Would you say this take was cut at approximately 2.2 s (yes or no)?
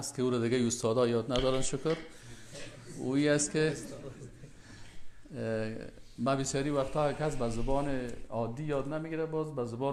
no